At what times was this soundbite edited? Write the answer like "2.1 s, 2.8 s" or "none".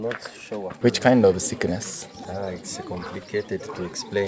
0.7 s, 2.3 s